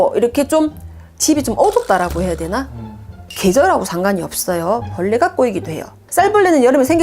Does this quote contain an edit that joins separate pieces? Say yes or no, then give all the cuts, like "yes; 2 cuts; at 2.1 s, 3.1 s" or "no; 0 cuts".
yes; 2 cuts; at 3.2 s, 6.0 s